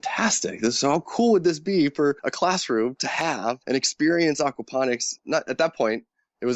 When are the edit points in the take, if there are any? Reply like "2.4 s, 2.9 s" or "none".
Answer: 2.3 s, 3.6 s, 5.1 s